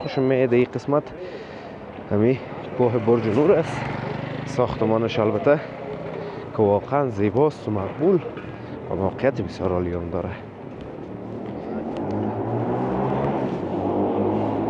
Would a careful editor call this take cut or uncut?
uncut